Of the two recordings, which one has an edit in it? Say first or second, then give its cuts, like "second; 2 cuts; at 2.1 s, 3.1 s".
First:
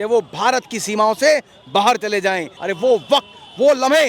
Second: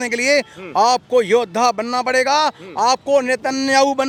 first; 1 cut; at 2.5 s